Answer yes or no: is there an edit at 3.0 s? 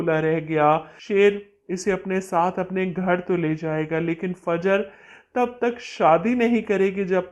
no